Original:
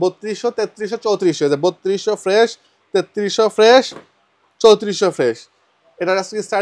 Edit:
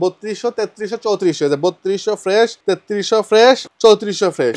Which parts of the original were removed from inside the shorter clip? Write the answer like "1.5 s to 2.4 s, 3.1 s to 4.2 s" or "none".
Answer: 2.6 s to 2.8 s, 3.9 s to 4.5 s